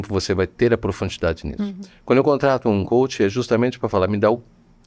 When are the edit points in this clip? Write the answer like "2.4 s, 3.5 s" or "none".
none